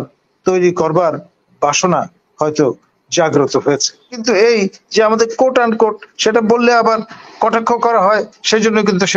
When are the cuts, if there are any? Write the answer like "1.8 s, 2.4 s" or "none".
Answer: 4.2 s